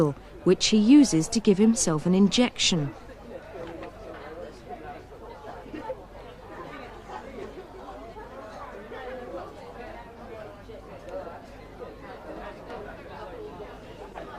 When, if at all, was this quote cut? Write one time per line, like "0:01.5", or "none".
0:10.1